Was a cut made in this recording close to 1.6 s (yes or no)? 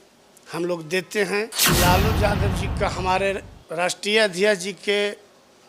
yes